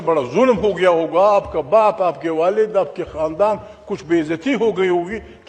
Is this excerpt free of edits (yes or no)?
yes